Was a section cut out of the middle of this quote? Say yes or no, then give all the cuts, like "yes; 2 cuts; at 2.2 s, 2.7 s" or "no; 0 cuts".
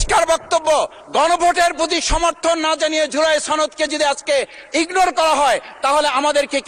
no; 0 cuts